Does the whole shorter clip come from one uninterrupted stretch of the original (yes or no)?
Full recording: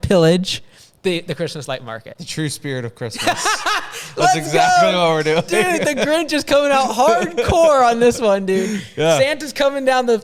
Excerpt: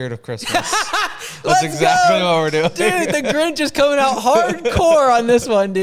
yes